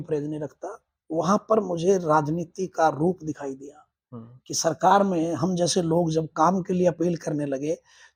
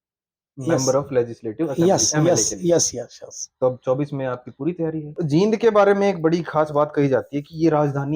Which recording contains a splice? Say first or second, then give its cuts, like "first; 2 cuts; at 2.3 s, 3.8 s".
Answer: second; 1 cut; at 5.1 s